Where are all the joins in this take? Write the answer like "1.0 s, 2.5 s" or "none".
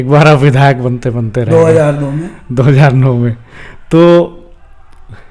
none